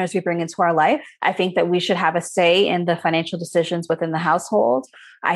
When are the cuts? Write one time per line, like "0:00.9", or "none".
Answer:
0:01.1